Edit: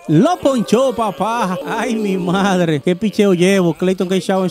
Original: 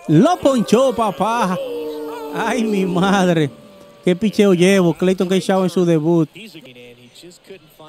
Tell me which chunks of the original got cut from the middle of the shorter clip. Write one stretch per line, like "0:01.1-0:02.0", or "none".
0:01.6-0:02.3
0:03.5-0:04.0